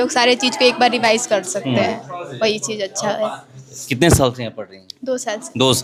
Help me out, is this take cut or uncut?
uncut